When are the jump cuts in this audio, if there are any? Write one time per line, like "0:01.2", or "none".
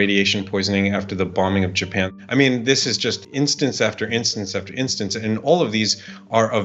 0:02.1
0:03.2